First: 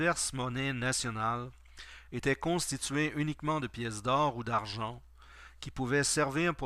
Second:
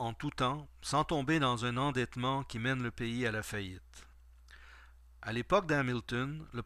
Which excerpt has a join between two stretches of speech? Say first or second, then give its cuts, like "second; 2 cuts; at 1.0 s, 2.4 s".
first; 1 cut; at 1.2 s